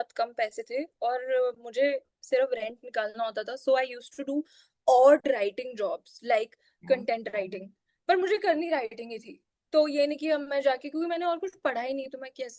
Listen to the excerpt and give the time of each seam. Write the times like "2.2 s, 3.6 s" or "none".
none